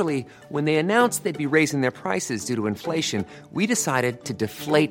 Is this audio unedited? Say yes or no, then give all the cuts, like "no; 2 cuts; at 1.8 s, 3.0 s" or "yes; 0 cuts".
yes; 0 cuts